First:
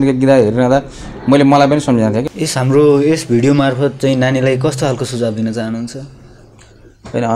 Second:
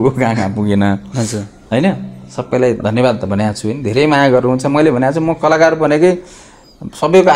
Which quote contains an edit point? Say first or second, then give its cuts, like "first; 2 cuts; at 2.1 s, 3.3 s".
first; 1 cut; at 2.3 s